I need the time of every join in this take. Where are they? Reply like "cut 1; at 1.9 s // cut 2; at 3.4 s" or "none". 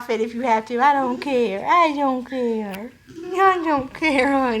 none

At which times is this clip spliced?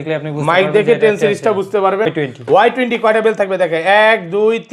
cut 1; at 2.1 s

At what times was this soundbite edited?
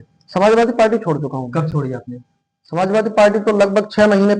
none

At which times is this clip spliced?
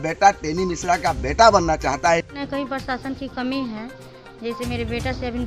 cut 1; at 2.3 s

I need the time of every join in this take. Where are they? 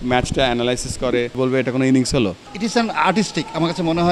cut 1; at 1.3 s // cut 2; at 2.5 s

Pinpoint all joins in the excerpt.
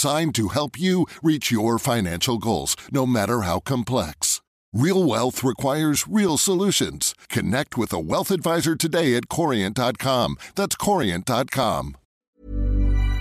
cut 1; at 12.0 s

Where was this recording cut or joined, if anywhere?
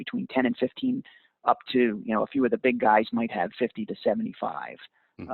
cut 1; at 3.5 s

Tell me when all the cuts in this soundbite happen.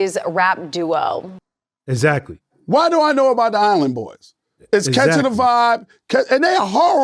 cut 1; at 1.3 s

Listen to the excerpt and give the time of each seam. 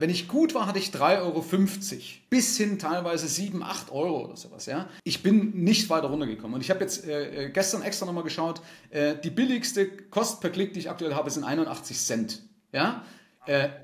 cut 1; at 2.1 s // cut 2; at 5.0 s

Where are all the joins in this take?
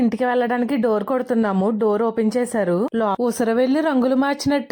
cut 1; at 3.2 s

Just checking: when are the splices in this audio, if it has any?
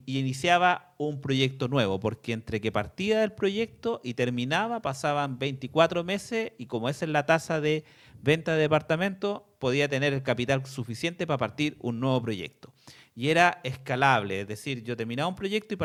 none

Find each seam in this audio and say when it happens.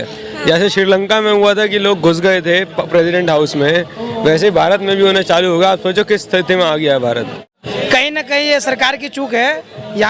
cut 1; at 7.5 s

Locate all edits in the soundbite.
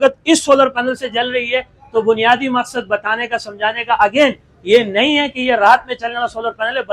none

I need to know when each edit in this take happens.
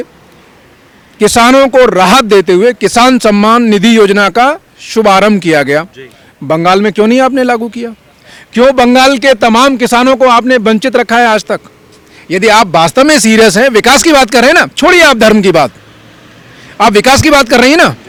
none

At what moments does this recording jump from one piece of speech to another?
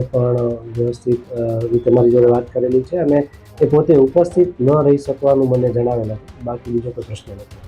none

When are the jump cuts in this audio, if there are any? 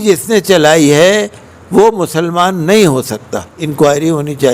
cut 1; at 3.6 s

